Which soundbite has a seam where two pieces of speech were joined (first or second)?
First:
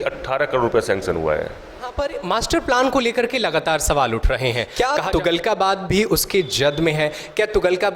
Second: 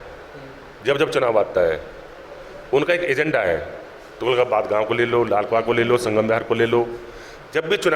first